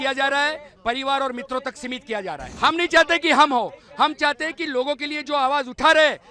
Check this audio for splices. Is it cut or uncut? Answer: cut